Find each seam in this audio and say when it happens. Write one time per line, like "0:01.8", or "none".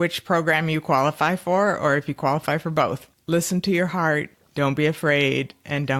0:03.1
0:04.4